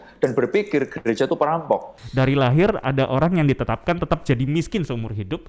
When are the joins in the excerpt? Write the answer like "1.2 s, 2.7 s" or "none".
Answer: 2.0 s